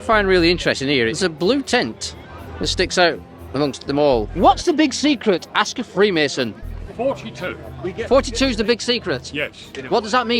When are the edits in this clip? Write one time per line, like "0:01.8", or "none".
0:01.1
0:04.3